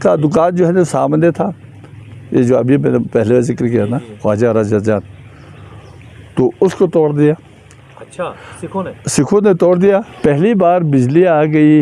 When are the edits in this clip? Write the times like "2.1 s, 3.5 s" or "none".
10.1 s